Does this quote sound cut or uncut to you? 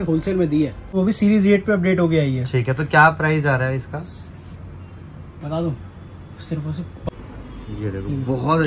cut